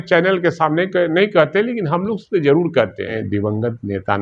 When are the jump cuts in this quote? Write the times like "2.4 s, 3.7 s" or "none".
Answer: 3.2 s